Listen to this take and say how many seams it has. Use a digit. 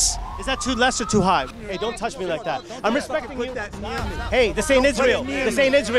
1